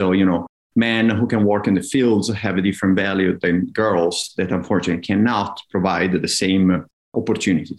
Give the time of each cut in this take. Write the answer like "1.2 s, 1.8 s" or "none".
none